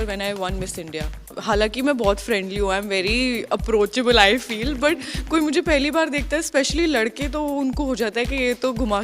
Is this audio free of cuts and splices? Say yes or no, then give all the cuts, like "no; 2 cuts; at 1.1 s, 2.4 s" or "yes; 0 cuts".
no; 1 cut; at 1.4 s